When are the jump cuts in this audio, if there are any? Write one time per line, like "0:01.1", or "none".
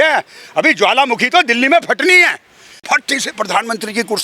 0:02.7